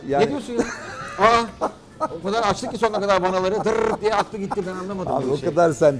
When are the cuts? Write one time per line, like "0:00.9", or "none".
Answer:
none